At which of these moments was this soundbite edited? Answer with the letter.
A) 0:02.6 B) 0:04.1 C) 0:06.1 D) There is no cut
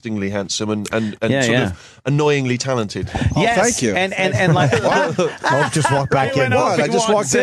D